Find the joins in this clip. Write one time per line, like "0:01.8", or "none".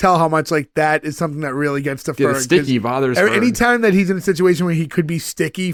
none